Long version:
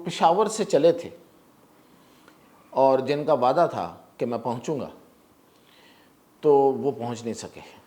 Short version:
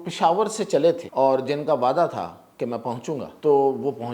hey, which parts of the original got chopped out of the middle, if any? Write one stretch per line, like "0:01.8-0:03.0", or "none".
0:01.0-0:02.6
0:04.9-0:06.3